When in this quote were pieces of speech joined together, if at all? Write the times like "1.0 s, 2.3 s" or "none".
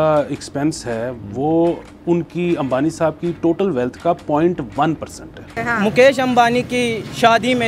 5.3 s